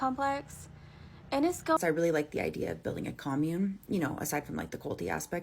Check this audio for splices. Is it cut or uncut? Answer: cut